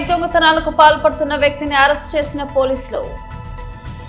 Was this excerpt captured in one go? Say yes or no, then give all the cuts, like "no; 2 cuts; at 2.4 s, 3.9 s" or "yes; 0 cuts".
no; 1 cut; at 3.2 s